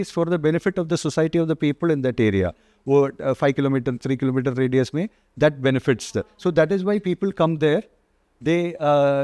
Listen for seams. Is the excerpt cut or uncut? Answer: uncut